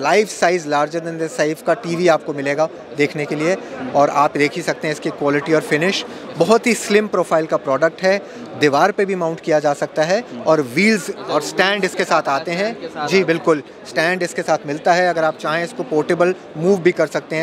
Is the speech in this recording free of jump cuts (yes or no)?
yes